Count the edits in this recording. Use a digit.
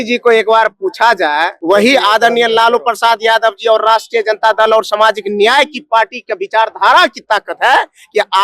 1